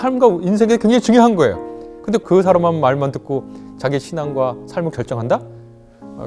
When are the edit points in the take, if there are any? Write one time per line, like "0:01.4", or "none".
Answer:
0:02.2